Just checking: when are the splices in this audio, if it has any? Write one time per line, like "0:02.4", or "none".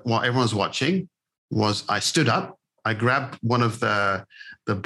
0:02.6